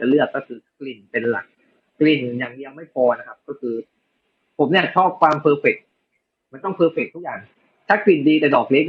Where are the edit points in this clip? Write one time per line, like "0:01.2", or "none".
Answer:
none